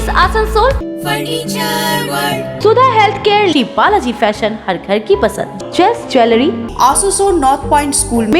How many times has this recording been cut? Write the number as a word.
three